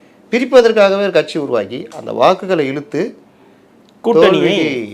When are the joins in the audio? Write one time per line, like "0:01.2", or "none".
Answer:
none